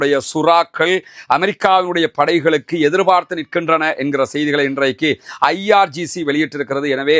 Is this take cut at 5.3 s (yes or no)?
no